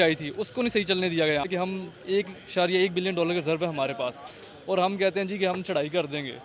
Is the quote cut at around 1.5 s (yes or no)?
yes